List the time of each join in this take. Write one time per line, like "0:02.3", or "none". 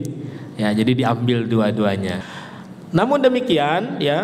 0:02.2